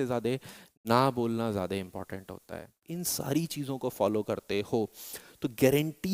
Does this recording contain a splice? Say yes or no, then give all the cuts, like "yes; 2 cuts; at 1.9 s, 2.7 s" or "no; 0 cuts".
yes; 1 cut; at 2.9 s